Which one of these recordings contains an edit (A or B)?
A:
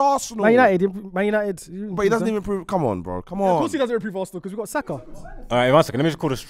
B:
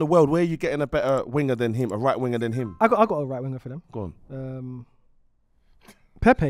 A